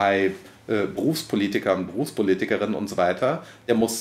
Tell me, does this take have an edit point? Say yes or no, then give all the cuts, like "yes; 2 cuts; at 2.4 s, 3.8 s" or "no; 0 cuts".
no; 0 cuts